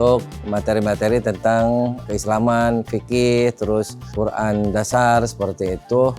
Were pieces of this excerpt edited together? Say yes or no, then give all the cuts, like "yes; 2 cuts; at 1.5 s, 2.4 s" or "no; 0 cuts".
no; 0 cuts